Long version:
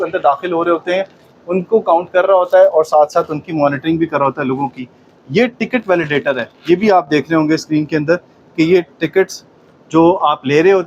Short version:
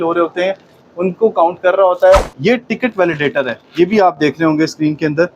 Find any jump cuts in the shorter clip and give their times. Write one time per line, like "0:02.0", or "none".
0:02.2